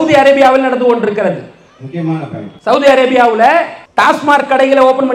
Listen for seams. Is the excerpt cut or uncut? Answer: cut